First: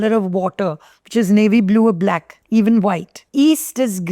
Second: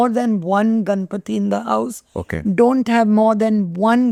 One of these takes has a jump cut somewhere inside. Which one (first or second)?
first